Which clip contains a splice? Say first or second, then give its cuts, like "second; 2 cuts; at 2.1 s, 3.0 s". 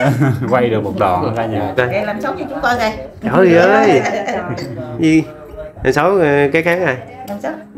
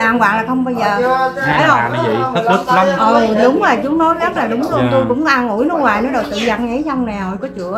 first; 1 cut; at 1.8 s